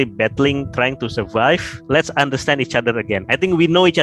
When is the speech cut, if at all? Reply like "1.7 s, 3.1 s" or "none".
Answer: 1.7 s

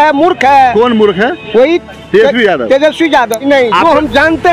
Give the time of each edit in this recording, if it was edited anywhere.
3.4 s

